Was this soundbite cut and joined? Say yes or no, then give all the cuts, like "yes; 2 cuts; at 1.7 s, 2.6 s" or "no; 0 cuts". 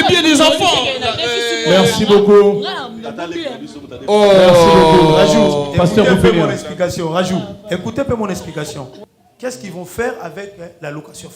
yes; 1 cut; at 8.9 s